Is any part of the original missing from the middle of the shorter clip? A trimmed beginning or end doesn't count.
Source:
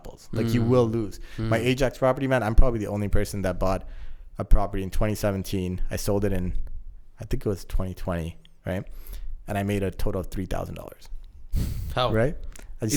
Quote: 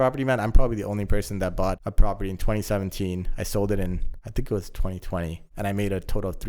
yes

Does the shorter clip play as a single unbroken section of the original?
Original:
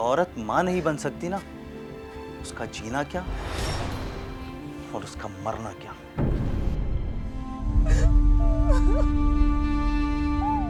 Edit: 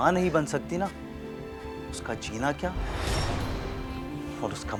yes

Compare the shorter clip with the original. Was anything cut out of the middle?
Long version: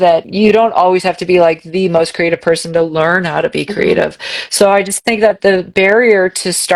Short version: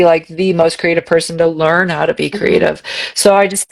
no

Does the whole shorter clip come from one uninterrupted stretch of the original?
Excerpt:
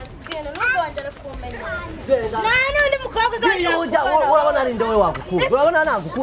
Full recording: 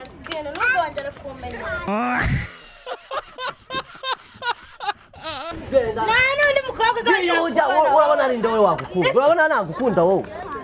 no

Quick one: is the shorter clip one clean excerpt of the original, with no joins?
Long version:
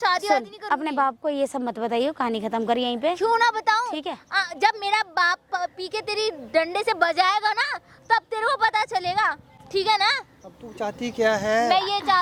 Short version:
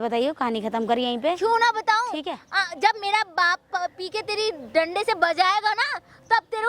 yes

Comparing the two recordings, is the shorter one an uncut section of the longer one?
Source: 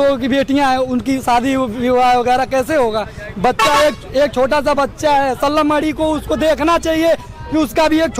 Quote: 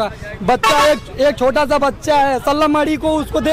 yes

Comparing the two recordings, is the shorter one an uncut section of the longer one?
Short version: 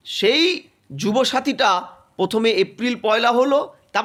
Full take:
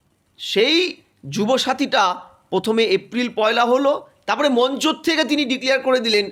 yes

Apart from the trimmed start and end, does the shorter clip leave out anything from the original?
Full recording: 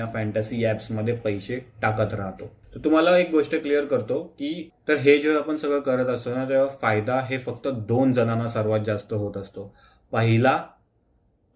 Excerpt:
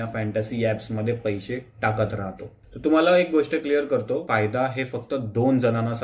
yes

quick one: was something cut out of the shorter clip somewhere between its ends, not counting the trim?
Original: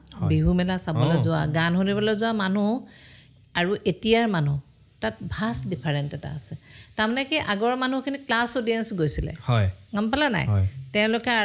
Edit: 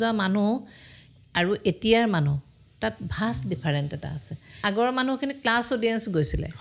yes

